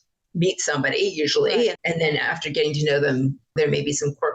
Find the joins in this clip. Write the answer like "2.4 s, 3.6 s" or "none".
1.8 s